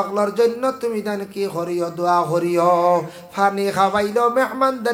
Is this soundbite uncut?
yes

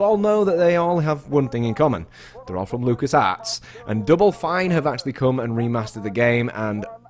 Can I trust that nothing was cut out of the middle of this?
yes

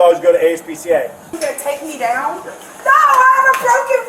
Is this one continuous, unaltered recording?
no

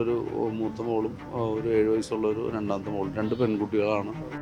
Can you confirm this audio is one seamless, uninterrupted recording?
yes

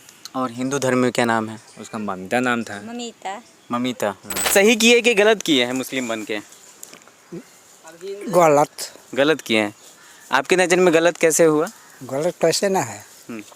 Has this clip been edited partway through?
yes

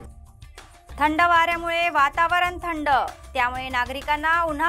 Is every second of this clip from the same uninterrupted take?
yes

